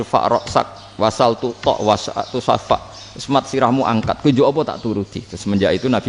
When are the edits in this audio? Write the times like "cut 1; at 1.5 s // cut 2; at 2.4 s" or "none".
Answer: none